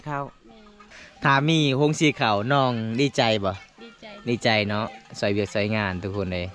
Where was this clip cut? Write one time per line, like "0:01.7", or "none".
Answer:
0:01.3